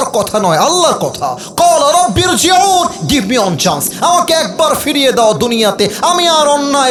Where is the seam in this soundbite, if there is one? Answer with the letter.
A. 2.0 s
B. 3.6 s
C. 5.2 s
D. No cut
D